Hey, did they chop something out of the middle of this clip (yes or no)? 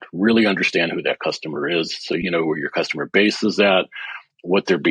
yes